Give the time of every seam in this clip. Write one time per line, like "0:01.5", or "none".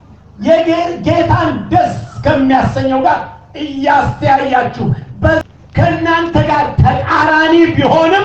0:05.5